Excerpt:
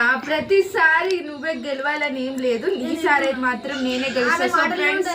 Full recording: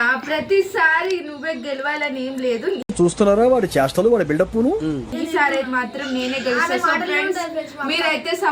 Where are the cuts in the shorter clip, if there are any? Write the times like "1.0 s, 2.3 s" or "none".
2.8 s